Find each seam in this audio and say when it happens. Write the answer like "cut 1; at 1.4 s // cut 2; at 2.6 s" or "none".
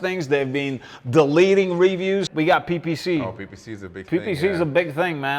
cut 1; at 2.3 s